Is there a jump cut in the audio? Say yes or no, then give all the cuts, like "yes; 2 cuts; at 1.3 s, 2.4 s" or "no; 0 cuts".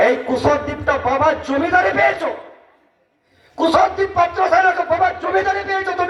no; 0 cuts